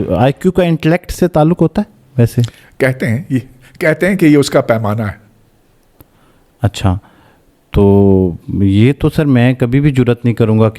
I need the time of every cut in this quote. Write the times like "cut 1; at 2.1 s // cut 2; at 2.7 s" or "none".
none